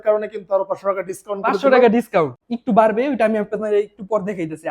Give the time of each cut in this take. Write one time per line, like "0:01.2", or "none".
0:02.4